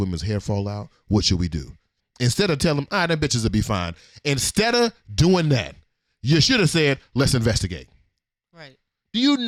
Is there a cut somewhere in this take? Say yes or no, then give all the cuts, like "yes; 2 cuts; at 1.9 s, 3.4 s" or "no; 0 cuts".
no; 0 cuts